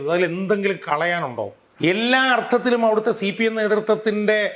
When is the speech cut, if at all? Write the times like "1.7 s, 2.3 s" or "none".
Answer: 1.6 s